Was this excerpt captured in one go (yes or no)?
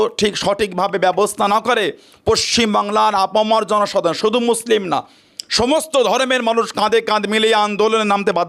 yes